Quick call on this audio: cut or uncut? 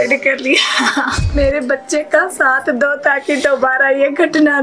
cut